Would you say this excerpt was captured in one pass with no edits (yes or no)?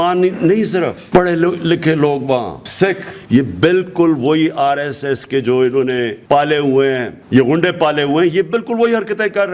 no